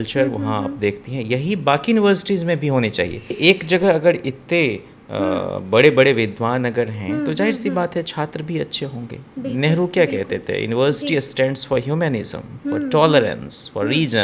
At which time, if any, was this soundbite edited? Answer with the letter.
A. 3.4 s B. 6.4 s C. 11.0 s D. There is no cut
A